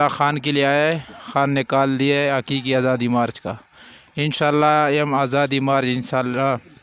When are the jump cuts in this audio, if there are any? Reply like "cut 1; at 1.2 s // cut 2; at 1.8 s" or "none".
none